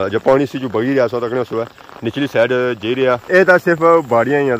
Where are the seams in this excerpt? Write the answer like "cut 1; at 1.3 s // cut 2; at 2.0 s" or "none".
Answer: cut 1; at 3.2 s